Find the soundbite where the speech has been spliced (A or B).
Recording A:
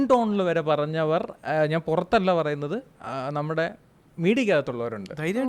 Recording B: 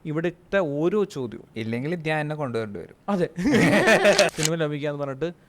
B